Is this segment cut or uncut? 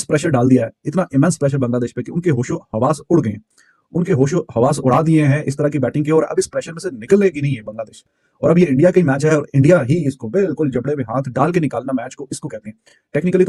uncut